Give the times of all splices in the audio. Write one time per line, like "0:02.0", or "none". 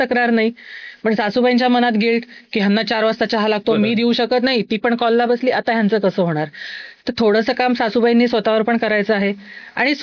none